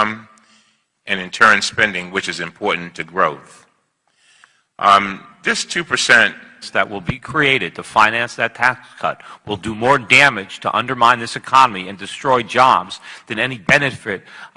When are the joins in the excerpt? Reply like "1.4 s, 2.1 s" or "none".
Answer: none